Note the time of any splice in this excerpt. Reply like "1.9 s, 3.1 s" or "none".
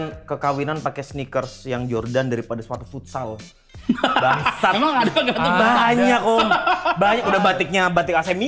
none